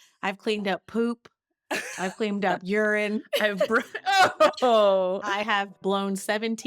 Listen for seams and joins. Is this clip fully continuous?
no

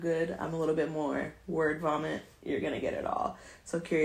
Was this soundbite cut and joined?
no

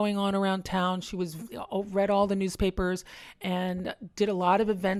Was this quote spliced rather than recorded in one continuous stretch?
no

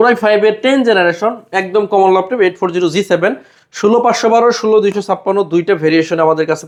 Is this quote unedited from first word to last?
yes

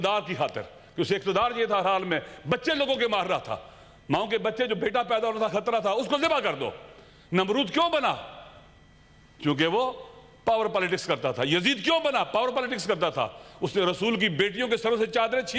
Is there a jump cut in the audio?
no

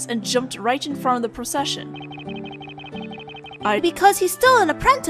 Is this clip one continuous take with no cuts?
yes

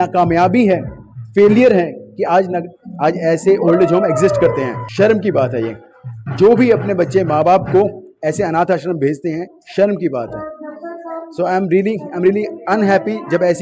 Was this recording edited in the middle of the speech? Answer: no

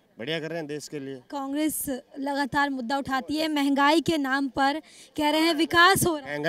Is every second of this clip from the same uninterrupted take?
yes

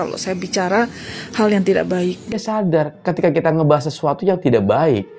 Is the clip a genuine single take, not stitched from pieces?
no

